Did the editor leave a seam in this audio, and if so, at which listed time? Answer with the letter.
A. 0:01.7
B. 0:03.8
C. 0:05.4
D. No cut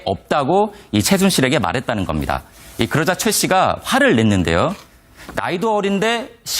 B